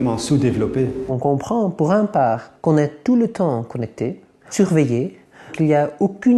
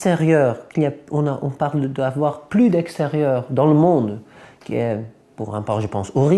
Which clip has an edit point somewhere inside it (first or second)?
first